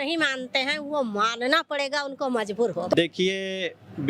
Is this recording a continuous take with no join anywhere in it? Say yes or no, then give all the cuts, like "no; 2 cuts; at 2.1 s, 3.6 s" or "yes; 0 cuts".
no; 1 cut; at 2.9 s